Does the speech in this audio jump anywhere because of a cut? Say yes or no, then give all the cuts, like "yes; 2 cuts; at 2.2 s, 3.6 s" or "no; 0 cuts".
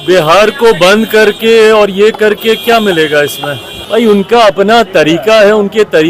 yes; 1 cut; at 3.7 s